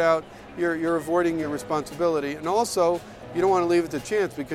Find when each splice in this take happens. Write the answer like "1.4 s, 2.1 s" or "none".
1.4 s

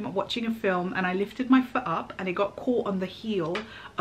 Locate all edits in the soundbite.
none

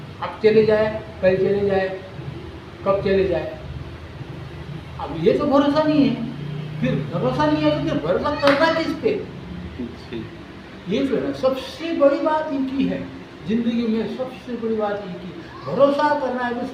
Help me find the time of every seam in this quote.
none

